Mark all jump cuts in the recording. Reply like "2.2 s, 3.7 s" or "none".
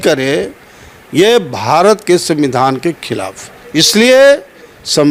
none